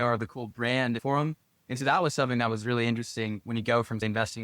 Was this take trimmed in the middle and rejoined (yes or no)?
yes